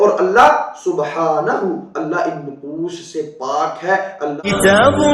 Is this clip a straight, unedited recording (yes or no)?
no